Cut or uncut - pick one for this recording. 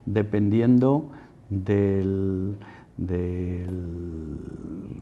uncut